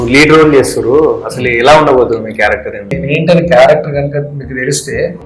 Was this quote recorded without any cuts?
no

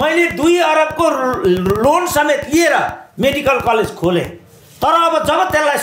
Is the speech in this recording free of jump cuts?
yes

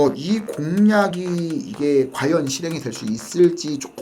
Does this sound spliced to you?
no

